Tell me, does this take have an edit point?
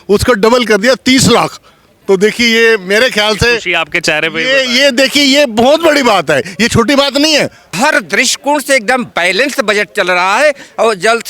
yes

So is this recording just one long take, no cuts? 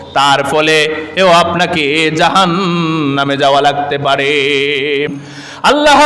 no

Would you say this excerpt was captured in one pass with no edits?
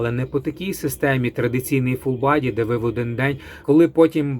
no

